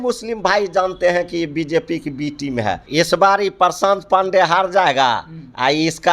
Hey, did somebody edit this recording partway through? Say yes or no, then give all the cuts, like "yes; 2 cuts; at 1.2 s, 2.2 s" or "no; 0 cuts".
yes; 1 cut; at 2.8 s